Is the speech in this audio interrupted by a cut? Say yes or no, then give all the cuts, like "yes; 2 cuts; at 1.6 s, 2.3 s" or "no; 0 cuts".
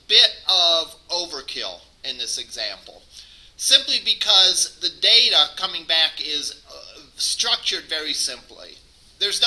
no; 0 cuts